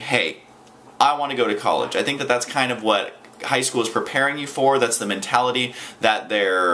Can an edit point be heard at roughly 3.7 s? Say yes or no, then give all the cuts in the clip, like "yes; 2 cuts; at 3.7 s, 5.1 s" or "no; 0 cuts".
no; 0 cuts